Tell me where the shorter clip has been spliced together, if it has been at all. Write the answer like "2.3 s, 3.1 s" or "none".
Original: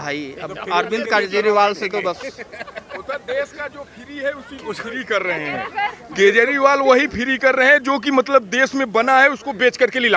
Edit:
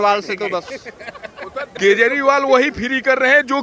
1.7 s